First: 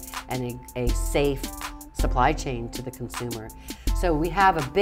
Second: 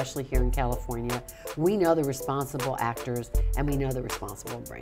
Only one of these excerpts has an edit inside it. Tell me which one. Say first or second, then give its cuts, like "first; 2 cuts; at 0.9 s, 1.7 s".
first; 1 cut; at 3.7 s